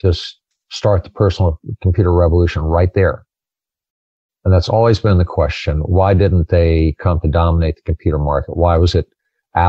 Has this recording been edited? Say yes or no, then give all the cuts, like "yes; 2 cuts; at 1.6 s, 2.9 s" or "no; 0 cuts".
no; 0 cuts